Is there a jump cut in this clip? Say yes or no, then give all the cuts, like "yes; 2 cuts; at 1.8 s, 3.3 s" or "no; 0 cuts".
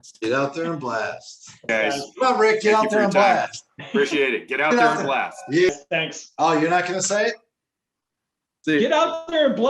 yes; 2 cuts; at 1.7 s, 5.7 s